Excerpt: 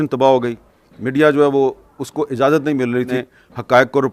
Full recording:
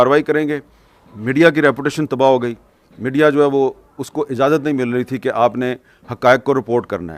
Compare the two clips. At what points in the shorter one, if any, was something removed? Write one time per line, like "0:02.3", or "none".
0:03.1